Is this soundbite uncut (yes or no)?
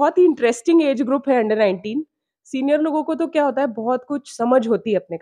yes